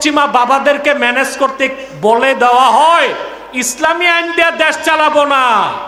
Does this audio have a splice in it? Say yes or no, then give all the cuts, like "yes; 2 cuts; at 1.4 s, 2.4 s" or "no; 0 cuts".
no; 0 cuts